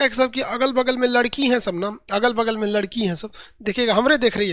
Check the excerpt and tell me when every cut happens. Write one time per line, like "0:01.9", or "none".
none